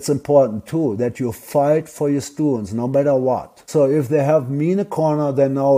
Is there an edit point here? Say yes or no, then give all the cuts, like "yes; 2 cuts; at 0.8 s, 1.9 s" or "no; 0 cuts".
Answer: no; 0 cuts